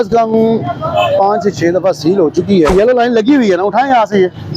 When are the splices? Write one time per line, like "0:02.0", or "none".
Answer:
0:02.7